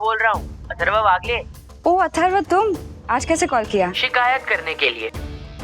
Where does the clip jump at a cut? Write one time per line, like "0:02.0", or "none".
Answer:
0:02.9
0:04.0